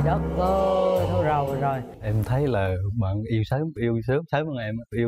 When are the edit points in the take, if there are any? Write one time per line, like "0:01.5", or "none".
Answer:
0:01.9